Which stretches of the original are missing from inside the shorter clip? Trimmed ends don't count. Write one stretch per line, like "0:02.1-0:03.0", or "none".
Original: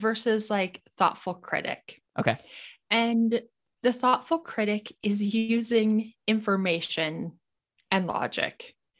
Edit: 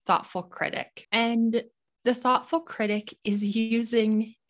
0:01.8-0:02.7